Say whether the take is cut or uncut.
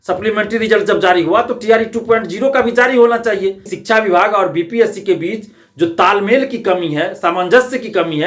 cut